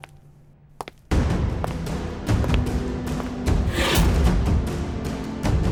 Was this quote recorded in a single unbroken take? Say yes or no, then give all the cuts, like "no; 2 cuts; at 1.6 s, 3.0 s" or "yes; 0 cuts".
yes; 0 cuts